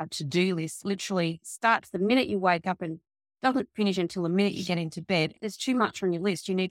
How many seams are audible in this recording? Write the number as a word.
two